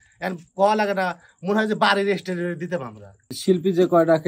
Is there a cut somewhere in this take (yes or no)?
yes